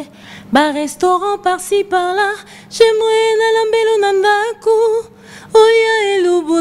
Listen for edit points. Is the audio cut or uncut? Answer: uncut